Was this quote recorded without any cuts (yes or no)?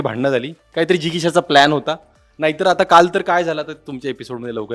yes